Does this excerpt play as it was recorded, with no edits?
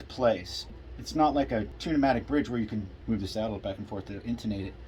no; 2 cuts; at 1.7 s, 2.9 s

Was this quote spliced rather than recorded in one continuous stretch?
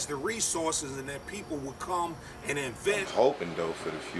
yes; 1 cut; at 3.0 s

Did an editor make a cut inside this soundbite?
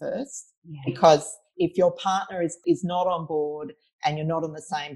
yes; 2 cuts; at 1.5 s, 2.6 s

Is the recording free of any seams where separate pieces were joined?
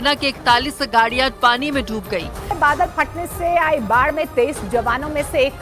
no; 1 cut; at 2.4 s

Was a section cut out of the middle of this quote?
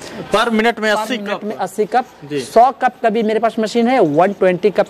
no; 0 cuts

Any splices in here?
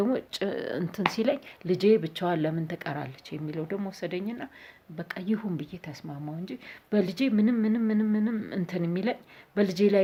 no; 0 cuts

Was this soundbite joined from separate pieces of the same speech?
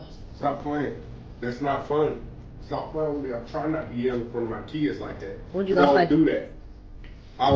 no; 0 cuts

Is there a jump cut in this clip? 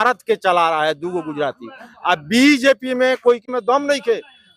no; 0 cuts

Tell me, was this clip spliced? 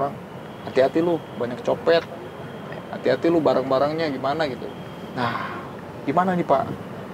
no; 0 cuts

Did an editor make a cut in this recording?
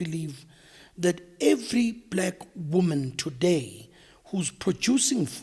no; 0 cuts

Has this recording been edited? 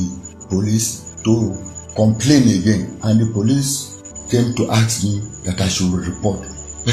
no; 0 cuts

